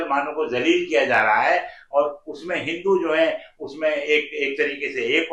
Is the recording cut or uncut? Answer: uncut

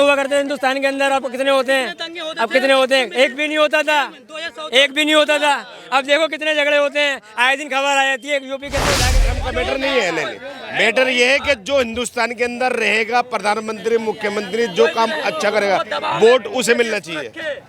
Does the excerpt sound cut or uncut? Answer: cut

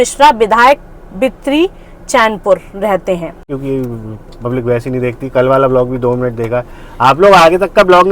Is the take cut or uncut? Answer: cut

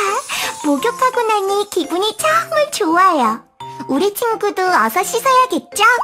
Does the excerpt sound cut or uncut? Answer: uncut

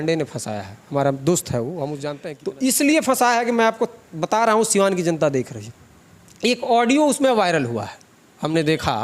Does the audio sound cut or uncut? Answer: cut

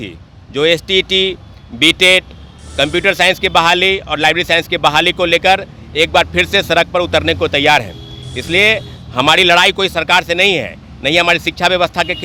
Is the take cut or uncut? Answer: uncut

